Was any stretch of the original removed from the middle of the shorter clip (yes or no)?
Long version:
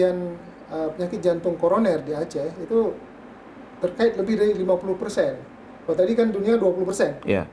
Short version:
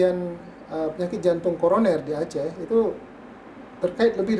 no